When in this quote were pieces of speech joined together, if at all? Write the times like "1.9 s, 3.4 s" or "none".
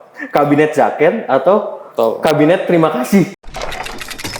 3.3 s